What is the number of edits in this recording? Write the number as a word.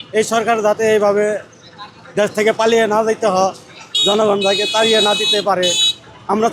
zero